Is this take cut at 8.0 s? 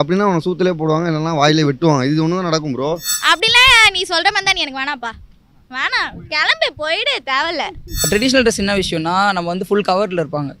yes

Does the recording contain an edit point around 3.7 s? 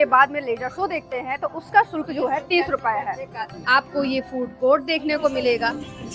yes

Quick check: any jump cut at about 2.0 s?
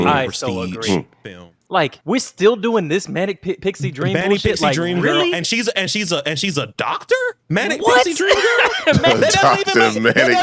yes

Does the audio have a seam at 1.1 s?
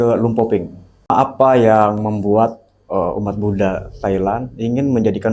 yes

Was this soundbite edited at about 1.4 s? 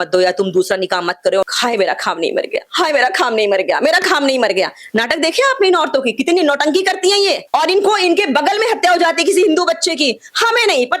yes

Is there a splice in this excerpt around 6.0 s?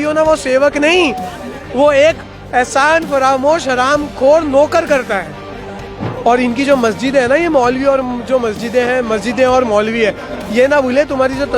yes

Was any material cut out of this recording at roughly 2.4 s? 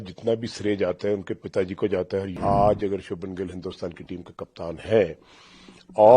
yes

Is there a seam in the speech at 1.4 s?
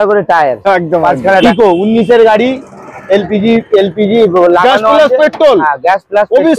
yes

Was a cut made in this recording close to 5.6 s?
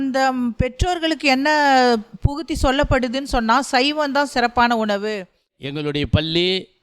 yes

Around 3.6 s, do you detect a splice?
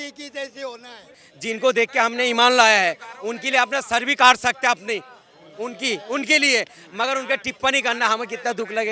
no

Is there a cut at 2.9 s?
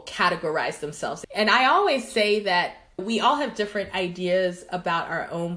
no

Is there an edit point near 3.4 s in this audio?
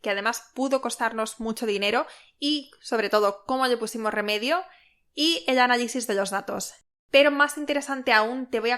no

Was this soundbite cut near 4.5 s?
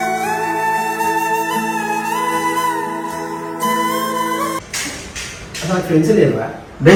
no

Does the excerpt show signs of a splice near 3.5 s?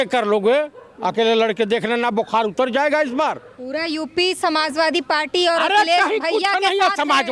yes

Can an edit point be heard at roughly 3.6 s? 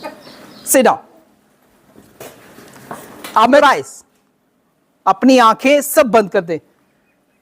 yes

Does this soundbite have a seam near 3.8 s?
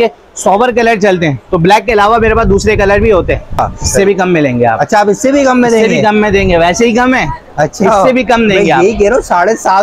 yes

